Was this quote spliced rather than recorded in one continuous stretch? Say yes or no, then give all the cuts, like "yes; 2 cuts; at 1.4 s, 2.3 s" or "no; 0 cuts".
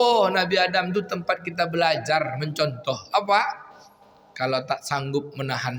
no; 0 cuts